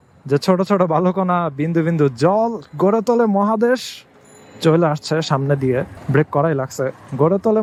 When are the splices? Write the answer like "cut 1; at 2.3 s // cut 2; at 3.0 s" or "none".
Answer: none